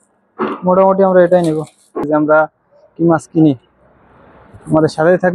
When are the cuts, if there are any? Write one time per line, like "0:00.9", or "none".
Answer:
0:02.1